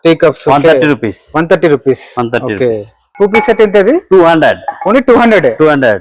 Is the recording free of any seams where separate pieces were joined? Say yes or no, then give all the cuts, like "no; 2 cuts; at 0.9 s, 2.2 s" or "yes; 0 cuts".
no; 1 cut; at 3.0 s